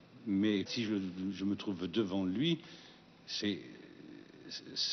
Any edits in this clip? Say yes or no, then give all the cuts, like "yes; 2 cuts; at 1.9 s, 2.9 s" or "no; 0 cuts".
yes; 1 cut; at 1.3 s